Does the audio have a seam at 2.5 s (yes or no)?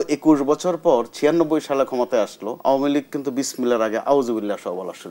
yes